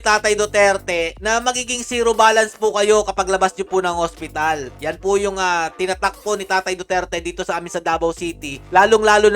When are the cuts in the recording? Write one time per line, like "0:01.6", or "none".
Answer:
none